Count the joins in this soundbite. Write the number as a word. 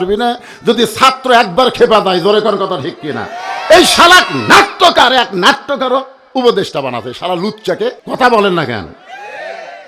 one